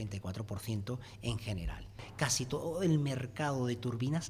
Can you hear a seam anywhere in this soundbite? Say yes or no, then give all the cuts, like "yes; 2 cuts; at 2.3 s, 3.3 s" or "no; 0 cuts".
yes; 1 cut; at 2.0 s